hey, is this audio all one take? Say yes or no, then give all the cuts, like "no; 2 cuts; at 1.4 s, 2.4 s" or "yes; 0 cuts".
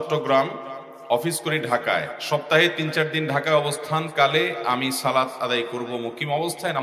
yes; 0 cuts